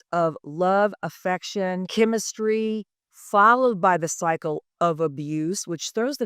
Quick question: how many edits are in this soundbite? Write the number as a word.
one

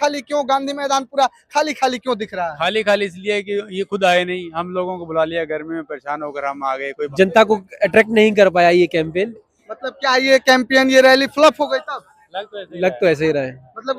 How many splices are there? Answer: one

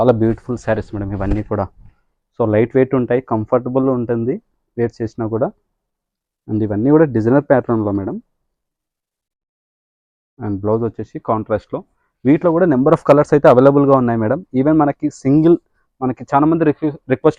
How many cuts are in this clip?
zero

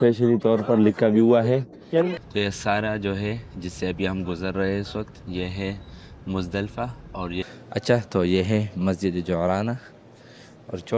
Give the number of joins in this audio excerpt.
two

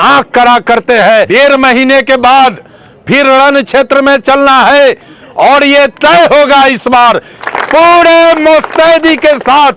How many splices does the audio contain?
two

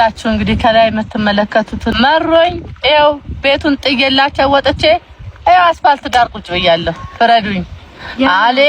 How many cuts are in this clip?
one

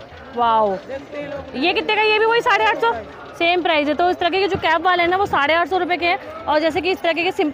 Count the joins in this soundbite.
zero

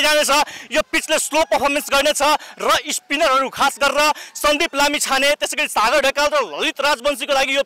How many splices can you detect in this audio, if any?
zero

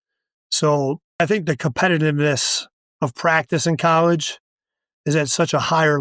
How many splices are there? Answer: one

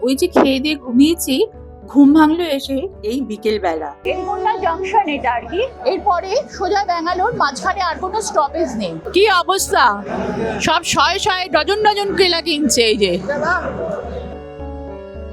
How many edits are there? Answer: three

